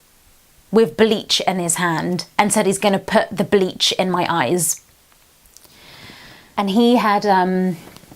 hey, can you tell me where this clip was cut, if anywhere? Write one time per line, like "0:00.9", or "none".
0:06.5